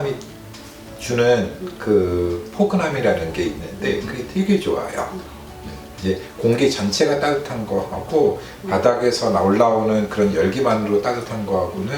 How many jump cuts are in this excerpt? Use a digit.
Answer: 0